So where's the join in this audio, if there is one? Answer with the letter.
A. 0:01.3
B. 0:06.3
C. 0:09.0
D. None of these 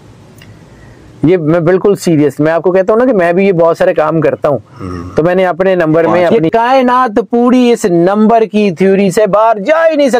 B